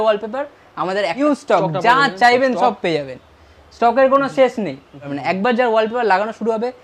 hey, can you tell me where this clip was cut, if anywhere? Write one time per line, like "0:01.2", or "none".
0:01.2
0:05.1